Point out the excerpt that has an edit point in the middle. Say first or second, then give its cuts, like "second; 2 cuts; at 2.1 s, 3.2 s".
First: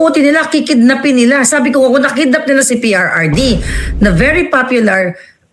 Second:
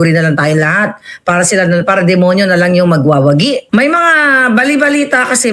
second; 1 cut; at 3.6 s